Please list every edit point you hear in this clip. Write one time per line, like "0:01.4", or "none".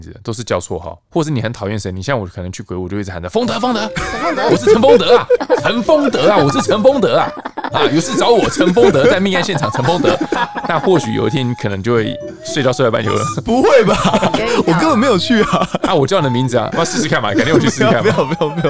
0:01.0